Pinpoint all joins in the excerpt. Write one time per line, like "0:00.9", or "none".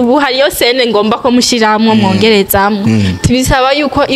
none